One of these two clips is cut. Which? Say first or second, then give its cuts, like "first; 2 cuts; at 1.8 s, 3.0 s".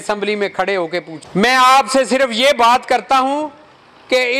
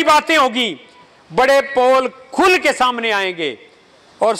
first; 1 cut; at 1.1 s